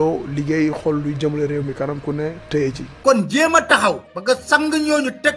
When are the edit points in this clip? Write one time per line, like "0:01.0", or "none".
0:02.9